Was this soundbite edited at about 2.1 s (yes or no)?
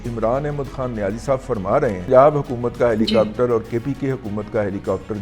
yes